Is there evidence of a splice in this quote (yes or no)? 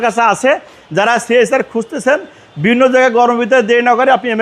no